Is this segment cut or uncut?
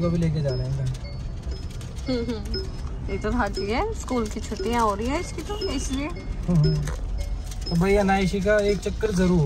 uncut